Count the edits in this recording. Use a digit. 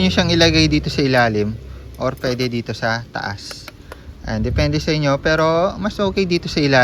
0